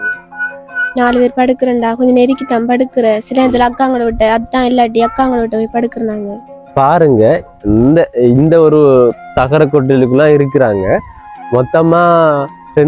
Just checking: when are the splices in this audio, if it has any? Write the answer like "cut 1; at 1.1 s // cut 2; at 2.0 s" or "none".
cut 1; at 6.7 s